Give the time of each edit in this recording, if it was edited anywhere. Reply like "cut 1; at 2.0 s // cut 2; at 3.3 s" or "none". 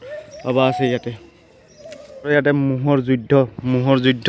cut 1; at 2.3 s